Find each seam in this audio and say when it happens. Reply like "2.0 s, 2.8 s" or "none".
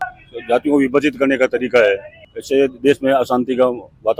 none